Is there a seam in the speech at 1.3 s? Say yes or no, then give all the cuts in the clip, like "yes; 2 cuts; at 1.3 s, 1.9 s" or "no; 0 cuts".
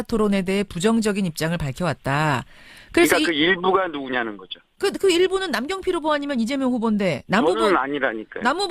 yes; 1 cut; at 1.3 s